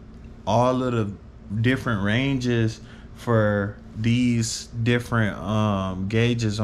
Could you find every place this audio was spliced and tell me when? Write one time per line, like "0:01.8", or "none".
none